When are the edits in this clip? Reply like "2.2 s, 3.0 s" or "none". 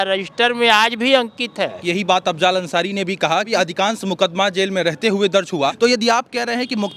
1.8 s, 3.5 s, 5.7 s